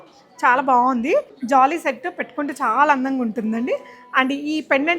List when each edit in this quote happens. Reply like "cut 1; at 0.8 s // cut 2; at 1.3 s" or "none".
cut 1; at 1.4 s